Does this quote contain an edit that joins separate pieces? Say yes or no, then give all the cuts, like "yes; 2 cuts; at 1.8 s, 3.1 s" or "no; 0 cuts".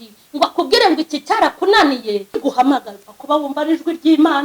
yes; 1 cut; at 2.4 s